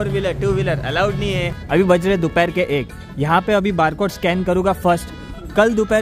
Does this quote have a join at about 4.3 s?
no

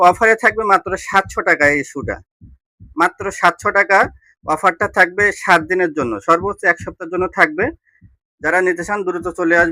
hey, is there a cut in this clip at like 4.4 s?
no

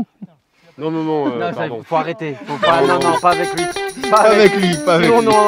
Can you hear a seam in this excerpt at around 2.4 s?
no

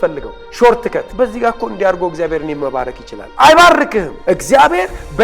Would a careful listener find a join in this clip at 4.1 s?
yes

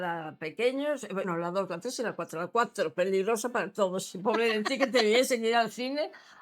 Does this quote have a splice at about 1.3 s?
yes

